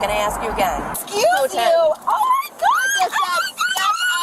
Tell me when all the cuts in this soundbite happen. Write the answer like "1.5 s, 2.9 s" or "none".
1.0 s